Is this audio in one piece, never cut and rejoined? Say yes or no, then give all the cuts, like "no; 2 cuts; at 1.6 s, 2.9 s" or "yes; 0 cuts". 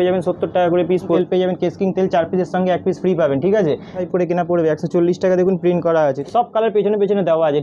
no; 3 cuts; at 1.2 s, 4.0 s, 6.2 s